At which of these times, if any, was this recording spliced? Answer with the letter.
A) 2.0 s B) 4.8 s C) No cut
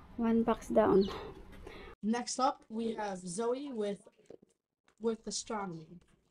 A